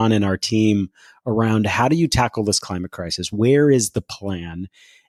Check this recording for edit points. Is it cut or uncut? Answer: uncut